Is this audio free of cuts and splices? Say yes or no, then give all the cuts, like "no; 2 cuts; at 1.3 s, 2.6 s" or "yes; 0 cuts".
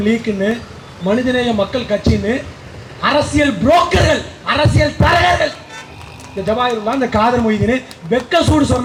yes; 0 cuts